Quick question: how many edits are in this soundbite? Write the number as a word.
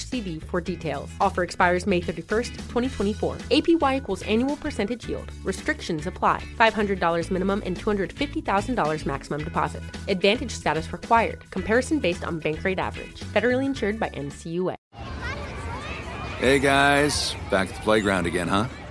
one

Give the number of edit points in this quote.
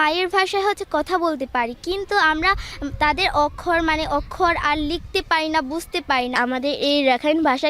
one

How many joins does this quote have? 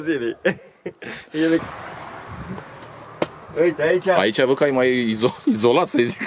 one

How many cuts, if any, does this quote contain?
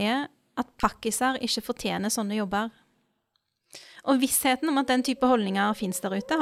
zero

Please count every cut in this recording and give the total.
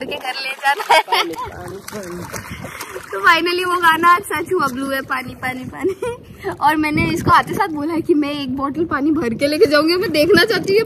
zero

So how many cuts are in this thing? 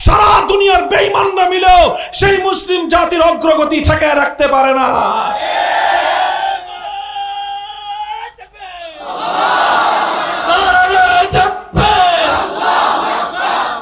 zero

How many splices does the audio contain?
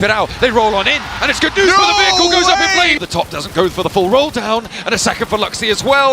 one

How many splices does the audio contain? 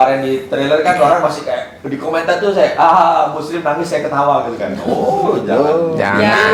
zero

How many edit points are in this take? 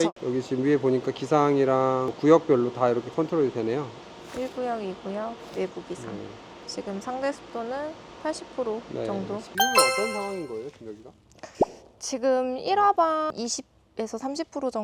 zero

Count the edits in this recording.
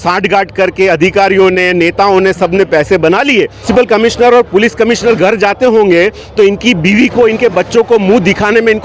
one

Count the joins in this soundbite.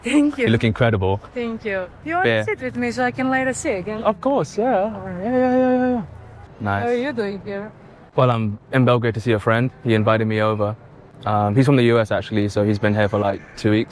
two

